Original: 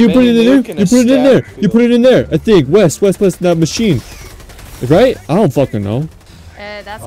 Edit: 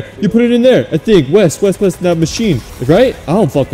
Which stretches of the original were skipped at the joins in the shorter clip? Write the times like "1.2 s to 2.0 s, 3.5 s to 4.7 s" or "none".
4.1 s to 4.7 s